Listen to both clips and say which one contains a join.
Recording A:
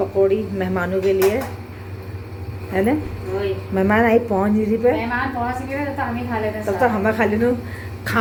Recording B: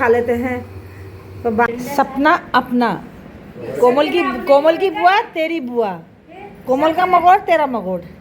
B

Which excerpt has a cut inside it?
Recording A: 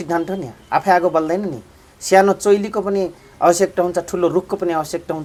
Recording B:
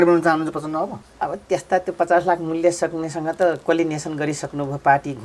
B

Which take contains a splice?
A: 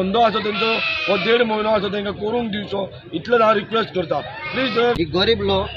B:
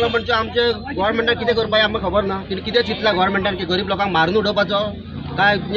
A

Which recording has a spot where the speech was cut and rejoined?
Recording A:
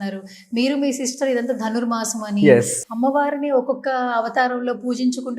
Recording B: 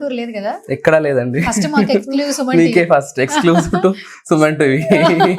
A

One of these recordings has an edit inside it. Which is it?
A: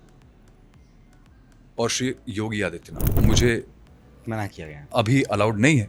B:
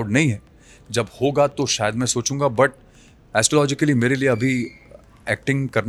A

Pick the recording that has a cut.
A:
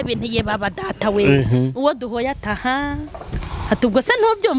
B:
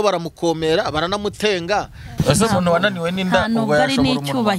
B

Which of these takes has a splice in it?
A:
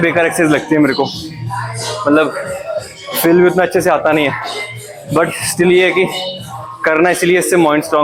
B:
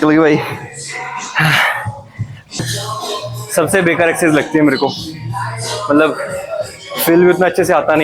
B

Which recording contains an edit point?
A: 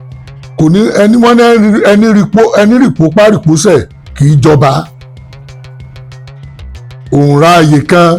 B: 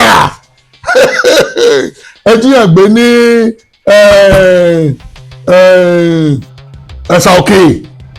A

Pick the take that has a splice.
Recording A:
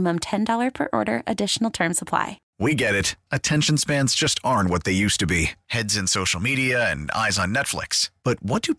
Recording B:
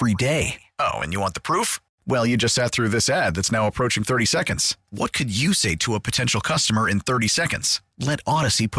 A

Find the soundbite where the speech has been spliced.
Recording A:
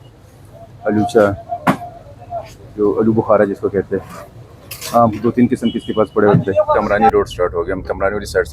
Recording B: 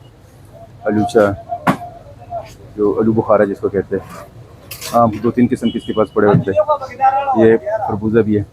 A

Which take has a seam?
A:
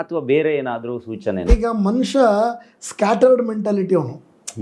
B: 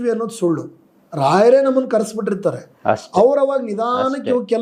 A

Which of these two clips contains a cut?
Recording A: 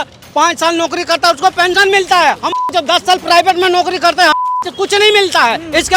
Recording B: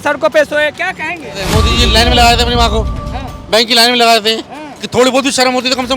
B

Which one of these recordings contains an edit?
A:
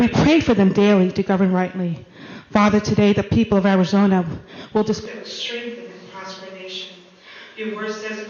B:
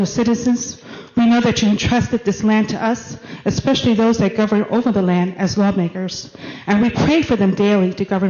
A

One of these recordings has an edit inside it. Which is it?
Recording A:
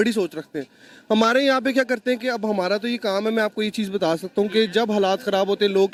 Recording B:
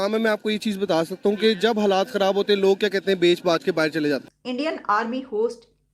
B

